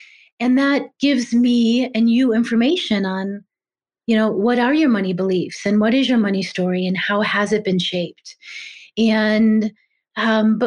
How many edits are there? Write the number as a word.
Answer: zero